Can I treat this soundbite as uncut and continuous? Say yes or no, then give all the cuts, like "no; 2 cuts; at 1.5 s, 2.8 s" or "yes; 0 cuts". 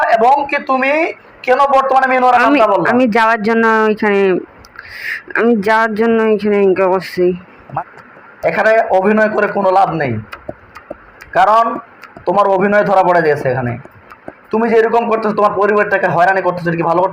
no; 1 cut; at 7.6 s